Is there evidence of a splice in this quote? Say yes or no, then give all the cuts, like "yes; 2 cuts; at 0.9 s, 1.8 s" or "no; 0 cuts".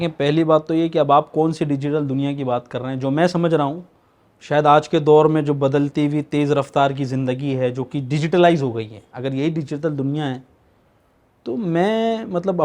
no; 0 cuts